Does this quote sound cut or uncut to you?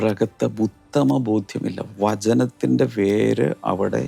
uncut